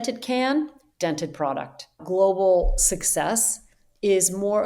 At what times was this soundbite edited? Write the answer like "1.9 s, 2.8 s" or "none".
2.0 s